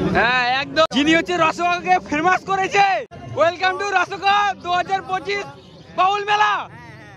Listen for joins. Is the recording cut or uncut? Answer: cut